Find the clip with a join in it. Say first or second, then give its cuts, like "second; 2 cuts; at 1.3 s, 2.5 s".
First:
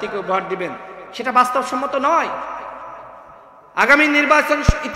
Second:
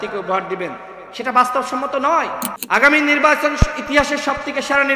second; 1 cut; at 2.5 s